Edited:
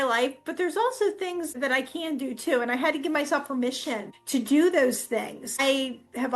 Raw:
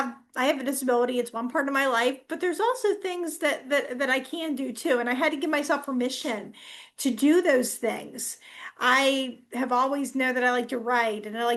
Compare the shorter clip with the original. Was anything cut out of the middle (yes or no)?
yes